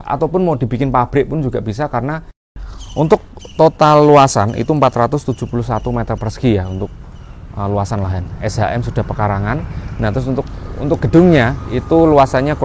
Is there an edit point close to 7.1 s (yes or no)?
no